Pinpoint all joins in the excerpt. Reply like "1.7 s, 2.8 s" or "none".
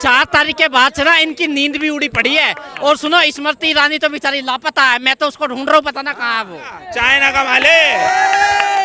6.8 s